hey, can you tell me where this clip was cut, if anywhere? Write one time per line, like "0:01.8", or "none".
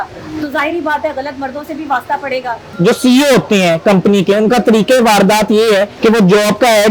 0:02.7
0:05.9